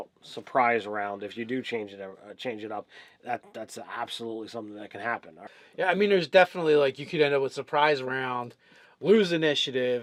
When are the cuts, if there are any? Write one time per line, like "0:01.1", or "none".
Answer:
none